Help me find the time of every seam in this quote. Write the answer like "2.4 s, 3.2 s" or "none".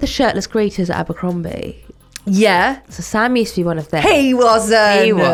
none

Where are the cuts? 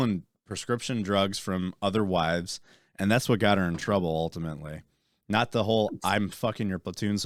none

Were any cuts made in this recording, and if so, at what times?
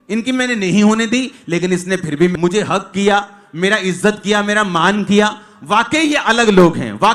2.3 s

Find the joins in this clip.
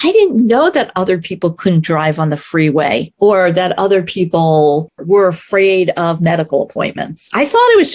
3.1 s, 5.0 s

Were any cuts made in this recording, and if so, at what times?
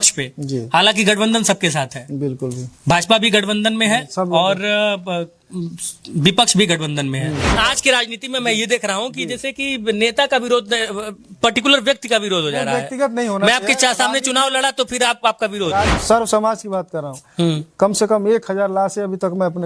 7.6 s, 16.0 s

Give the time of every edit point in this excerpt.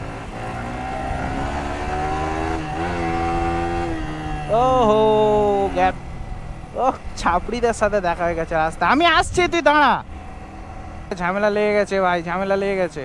6.0 s, 11.2 s

